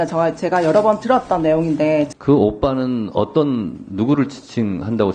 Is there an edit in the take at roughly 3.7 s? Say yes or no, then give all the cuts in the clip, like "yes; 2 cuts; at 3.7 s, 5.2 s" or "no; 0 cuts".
no; 1 cut; at 2.1 s